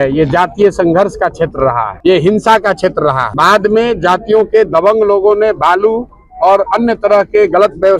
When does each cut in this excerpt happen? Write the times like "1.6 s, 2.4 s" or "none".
1.9 s, 3.3 s